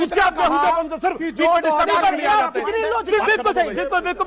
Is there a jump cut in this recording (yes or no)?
yes